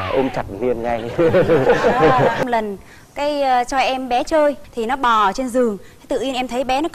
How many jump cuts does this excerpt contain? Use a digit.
1